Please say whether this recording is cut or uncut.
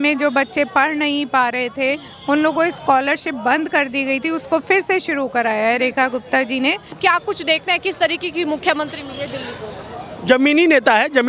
cut